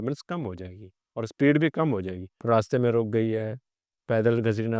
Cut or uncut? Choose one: cut